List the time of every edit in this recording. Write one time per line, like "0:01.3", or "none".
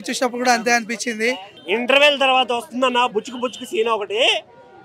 0:01.5

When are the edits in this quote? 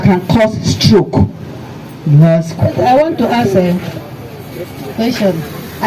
0:02.5

